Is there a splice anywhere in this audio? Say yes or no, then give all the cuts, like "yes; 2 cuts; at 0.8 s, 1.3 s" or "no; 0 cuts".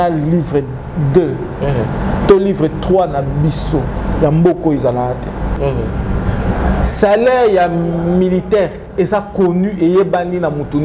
yes; 1 cut; at 5.5 s